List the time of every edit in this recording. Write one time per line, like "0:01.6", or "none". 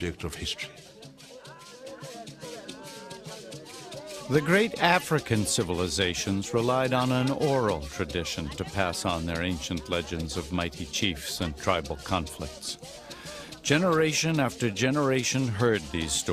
0:14.9